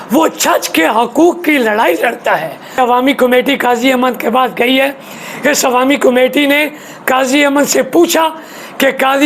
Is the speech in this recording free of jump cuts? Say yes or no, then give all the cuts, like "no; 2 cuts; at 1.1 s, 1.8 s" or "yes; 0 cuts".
no; 1 cut; at 2.8 s